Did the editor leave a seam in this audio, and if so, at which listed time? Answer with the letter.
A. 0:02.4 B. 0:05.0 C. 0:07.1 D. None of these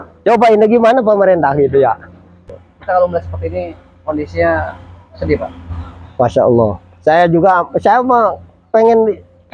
A